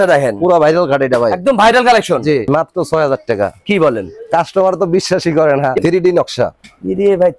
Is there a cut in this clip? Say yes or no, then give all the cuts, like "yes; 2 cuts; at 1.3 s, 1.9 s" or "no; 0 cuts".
yes; 2 cuts; at 2.5 s, 5.8 s